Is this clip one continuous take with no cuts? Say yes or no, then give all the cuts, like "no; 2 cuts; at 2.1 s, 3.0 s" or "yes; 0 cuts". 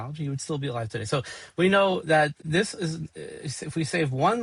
yes; 0 cuts